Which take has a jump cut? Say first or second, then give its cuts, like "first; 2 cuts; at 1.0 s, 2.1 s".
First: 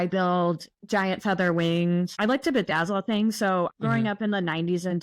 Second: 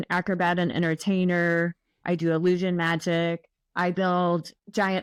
first; 2 cuts; at 2.1 s, 3.7 s